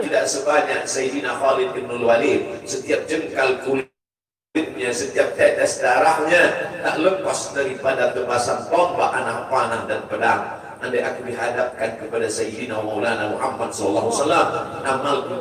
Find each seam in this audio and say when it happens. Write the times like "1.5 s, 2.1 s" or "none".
none